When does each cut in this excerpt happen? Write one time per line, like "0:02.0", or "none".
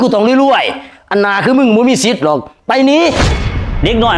0:03.2